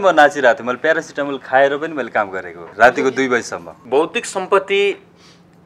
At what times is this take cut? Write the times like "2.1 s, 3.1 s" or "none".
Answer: 2.6 s, 3.7 s